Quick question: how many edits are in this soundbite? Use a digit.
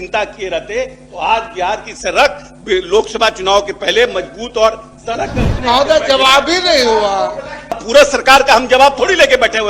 2